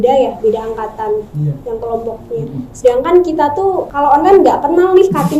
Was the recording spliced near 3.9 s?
yes; 1 cut; at 3.9 s

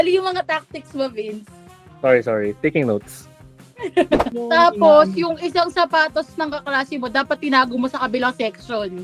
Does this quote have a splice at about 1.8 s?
no; 1 cut; at 4.3 s

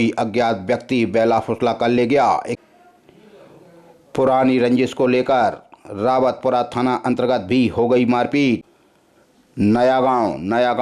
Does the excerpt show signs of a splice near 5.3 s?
no; 2 cuts; at 2.5 s, 8.8 s

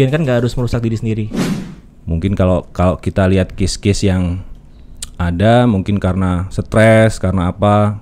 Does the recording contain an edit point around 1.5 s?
yes; 1 cut; at 1.5 s

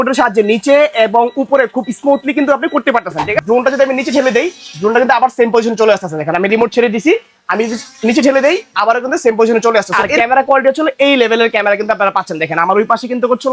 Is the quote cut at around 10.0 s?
yes; 2 cuts; at 3.4 s, 10.0 s

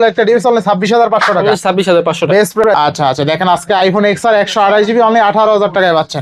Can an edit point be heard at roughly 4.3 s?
no; 1 cut; at 2.6 s

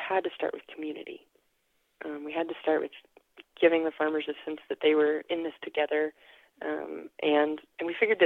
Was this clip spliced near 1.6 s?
no; 0 cuts

